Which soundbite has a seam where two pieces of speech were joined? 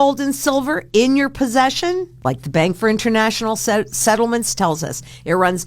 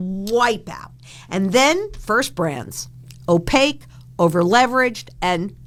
first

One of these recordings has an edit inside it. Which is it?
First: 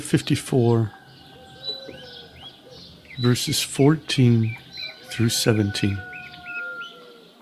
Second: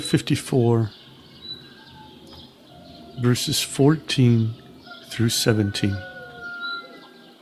first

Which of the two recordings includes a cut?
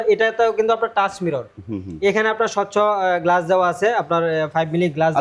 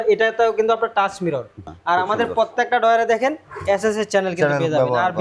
second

